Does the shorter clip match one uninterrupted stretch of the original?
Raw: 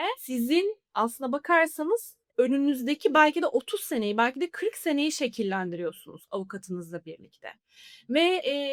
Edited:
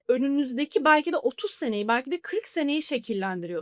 yes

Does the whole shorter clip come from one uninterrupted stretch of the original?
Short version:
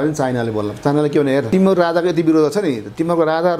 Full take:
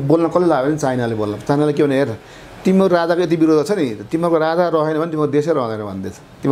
no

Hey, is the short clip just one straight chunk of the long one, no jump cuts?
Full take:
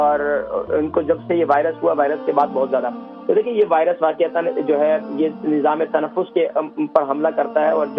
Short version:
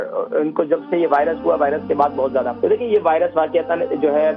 no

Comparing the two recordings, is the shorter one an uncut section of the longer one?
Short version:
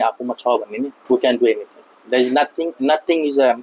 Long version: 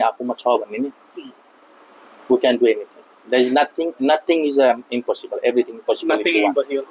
no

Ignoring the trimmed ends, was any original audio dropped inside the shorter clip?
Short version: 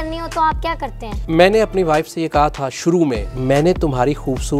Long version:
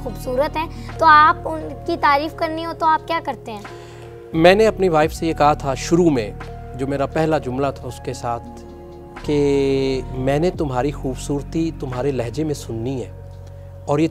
yes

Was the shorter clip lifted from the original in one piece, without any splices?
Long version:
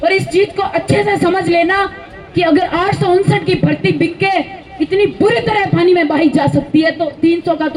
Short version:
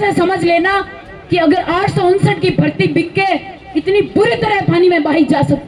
yes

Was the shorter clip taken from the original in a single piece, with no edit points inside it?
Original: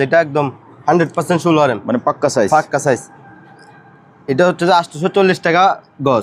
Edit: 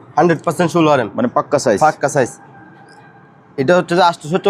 yes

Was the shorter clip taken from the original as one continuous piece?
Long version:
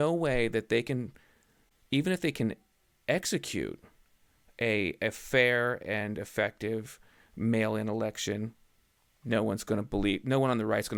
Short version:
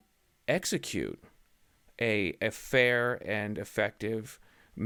yes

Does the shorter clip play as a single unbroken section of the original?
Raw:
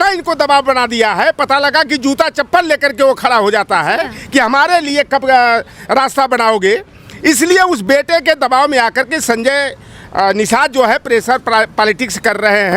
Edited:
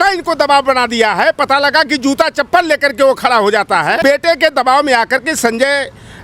no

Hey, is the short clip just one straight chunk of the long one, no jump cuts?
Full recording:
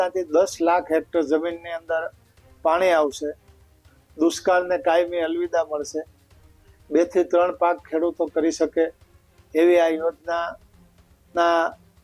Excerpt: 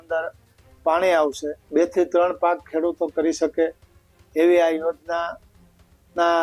no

